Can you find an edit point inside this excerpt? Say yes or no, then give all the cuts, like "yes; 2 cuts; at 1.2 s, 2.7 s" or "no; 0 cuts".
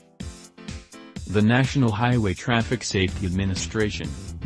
yes; 1 cut; at 1.2 s